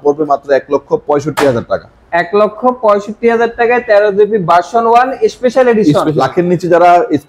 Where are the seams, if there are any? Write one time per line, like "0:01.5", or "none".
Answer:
0:06.1